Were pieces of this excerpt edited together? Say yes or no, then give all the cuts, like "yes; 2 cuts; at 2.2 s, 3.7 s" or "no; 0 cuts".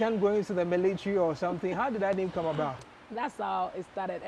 yes; 1 cut; at 2.8 s